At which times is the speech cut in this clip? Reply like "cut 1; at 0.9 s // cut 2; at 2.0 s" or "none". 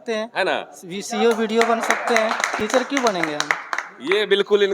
none